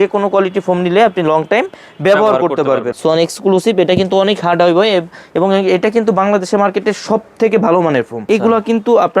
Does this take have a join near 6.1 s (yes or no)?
no